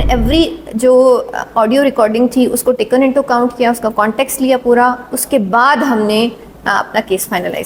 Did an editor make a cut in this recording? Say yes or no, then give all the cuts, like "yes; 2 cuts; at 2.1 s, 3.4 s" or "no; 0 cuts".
no; 0 cuts